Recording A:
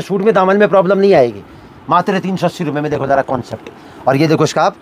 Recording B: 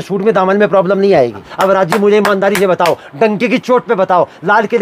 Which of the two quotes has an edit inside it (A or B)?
B